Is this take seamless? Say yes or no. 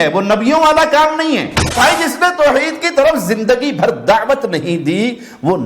no